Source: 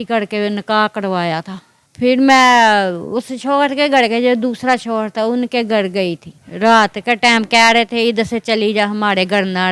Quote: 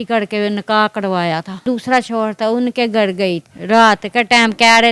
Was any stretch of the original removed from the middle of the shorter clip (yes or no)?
yes